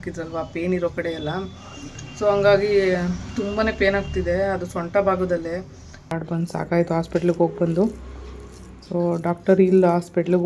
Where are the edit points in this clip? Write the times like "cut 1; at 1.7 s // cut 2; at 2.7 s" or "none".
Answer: cut 1; at 6.1 s

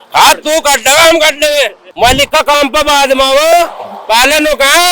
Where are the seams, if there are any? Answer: cut 1; at 1.8 s

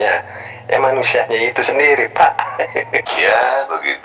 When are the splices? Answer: cut 1; at 3.0 s

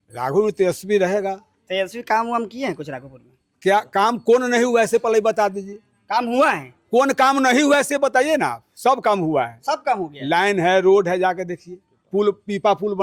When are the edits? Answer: none

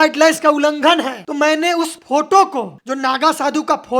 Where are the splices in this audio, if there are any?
none

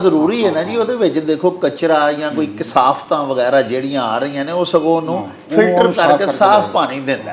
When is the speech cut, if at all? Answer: none

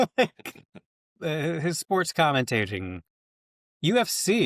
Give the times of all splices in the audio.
cut 1; at 1.1 s

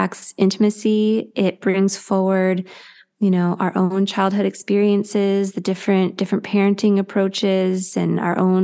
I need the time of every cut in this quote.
none

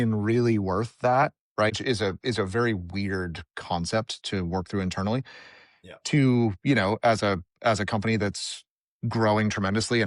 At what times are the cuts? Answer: cut 1; at 1.7 s

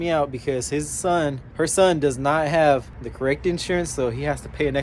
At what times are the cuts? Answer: cut 1; at 1.4 s // cut 2; at 3.0 s

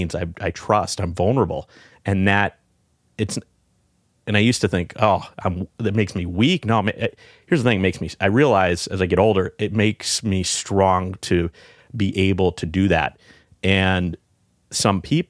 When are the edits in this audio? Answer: none

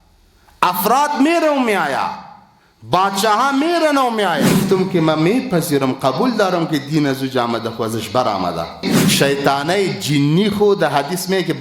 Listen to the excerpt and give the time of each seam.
cut 1; at 4.6 s // cut 2; at 9.0 s

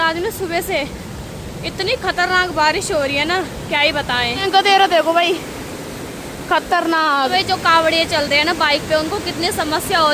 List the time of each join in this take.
cut 1; at 4.4 s // cut 2; at 7.3 s

